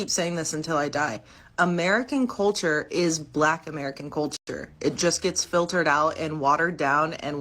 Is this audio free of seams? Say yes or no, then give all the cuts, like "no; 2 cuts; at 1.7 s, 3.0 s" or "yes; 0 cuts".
yes; 0 cuts